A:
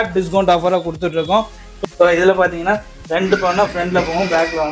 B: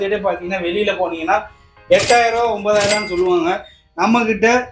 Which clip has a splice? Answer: A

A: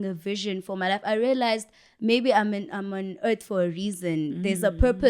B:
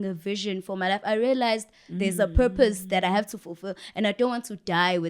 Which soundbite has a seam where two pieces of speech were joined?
B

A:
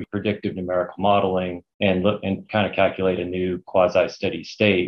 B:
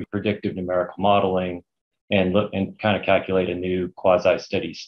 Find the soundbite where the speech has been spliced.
A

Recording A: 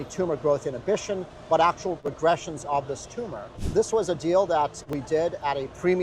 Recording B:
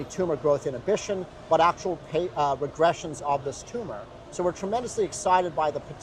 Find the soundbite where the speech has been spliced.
A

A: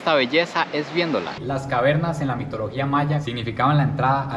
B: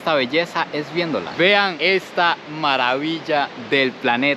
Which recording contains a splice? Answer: A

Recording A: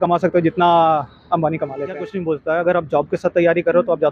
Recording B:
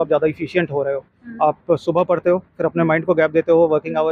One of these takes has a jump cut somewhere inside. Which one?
A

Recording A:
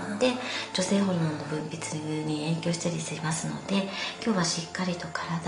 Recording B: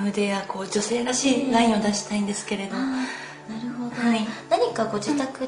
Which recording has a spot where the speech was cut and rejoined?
B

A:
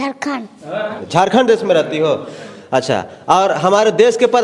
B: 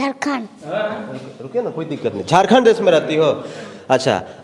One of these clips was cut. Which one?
A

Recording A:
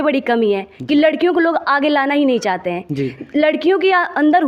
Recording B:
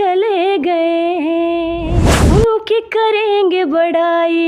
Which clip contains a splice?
B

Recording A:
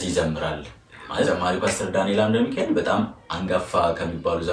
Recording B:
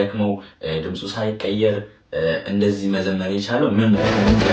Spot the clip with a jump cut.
A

